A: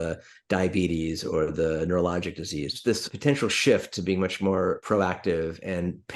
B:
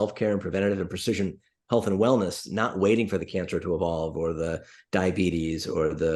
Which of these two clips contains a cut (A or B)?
A